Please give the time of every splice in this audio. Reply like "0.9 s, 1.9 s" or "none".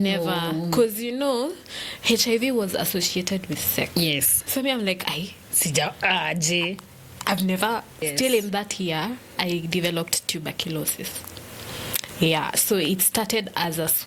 7.9 s